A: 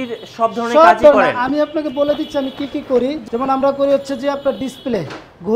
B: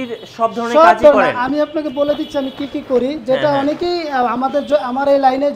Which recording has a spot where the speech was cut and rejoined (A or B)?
A